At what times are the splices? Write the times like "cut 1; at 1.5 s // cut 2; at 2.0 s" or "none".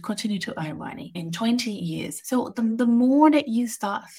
cut 1; at 1.2 s // cut 2; at 2.1 s